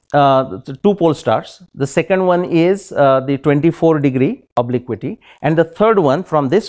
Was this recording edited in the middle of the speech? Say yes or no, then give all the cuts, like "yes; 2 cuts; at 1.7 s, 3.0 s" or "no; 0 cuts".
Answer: no; 0 cuts